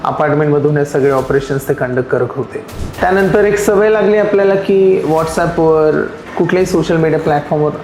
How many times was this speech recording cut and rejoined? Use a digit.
2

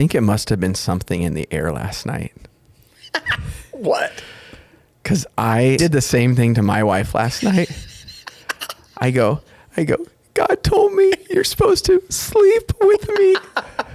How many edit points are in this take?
1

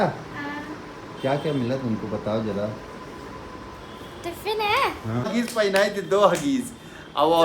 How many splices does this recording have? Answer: 1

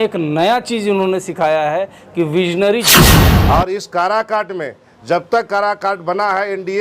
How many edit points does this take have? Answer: 1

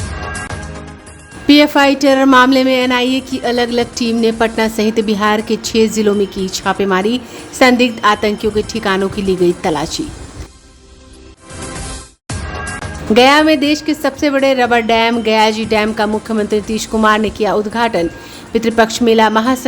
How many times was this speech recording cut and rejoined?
1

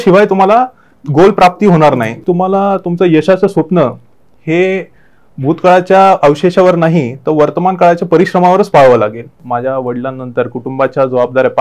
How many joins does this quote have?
2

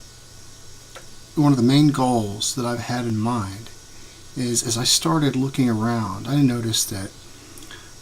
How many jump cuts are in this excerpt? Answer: 1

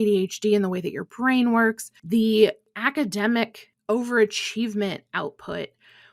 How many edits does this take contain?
3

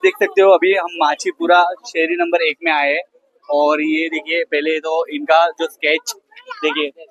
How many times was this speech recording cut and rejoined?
0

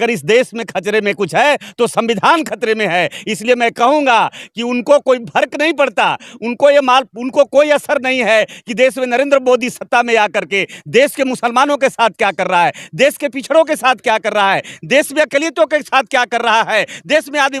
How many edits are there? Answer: 0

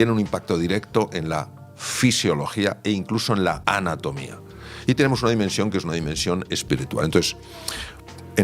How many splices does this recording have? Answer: 1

